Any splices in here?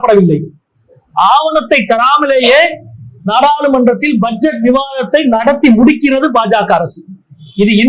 no; 0 cuts

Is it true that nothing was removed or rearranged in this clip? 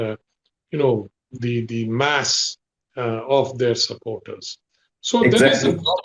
yes; 0 cuts

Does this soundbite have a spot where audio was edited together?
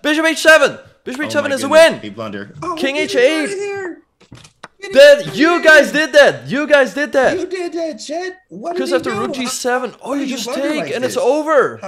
no; 0 cuts

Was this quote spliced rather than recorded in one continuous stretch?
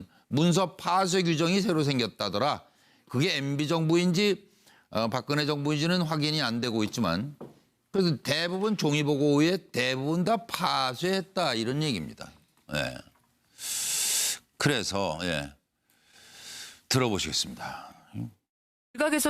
yes; 1 cut; at 9.7 s

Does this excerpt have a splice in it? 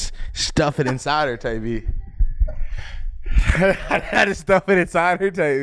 no; 0 cuts

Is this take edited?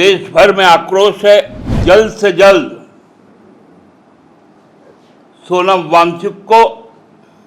yes; 1 cut; at 1.8 s

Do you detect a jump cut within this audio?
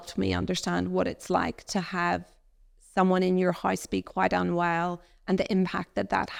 no; 0 cuts

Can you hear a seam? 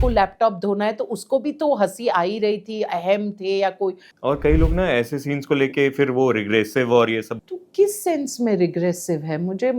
yes; 2 cuts; at 4.1 s, 7.3 s

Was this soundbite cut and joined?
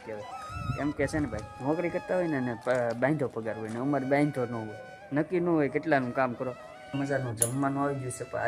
yes; 2 cuts; at 1.5 s, 6.8 s

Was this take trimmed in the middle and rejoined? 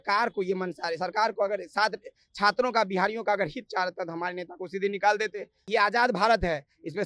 yes; 1 cut; at 5.6 s

